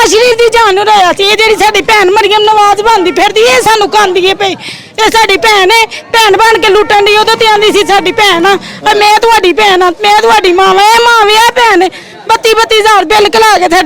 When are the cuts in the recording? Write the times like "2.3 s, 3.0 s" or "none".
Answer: none